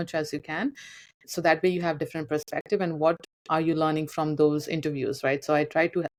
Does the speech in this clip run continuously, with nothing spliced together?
yes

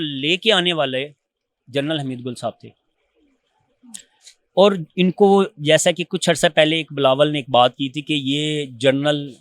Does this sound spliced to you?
no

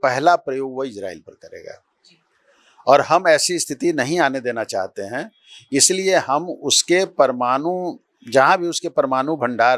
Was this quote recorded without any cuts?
yes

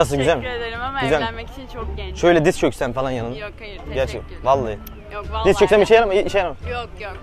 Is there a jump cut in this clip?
no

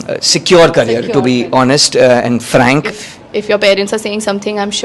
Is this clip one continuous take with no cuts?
no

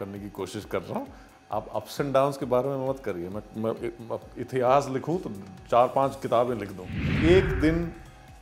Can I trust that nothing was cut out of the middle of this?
no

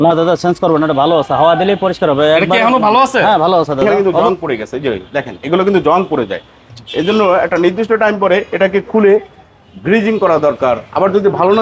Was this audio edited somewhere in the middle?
yes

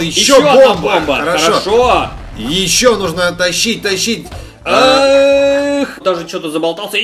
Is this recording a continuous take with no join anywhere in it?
no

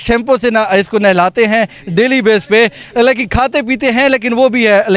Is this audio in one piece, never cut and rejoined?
yes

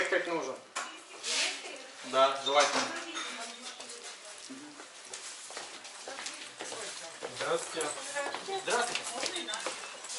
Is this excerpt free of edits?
yes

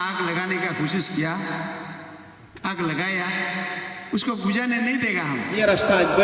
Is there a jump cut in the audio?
yes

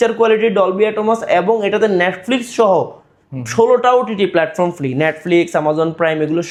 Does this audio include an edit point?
no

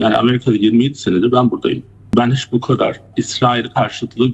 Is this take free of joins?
no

